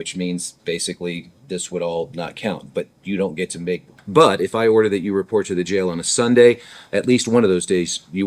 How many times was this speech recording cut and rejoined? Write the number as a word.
one